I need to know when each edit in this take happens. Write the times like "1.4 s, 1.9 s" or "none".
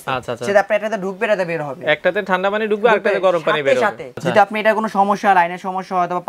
4.2 s